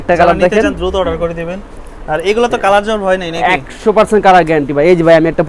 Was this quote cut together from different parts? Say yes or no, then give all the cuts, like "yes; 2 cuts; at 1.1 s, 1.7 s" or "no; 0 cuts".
no; 0 cuts